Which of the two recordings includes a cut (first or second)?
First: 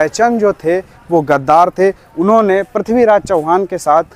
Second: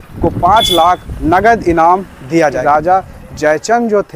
second